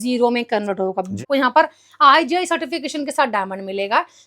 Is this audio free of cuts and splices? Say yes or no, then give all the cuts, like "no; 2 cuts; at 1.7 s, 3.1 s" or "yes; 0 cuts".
no; 1 cut; at 1.2 s